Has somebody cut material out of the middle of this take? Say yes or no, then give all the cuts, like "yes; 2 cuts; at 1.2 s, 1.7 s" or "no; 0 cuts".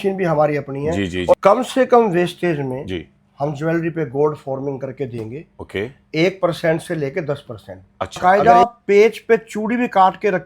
yes; 2 cuts; at 1.4 s, 8.2 s